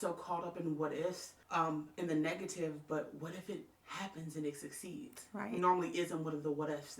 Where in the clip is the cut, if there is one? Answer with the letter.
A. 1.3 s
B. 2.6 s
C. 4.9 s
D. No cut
A